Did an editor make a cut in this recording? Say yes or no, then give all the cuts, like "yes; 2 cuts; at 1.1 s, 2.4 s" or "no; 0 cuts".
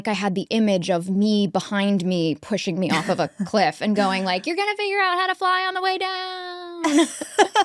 no; 0 cuts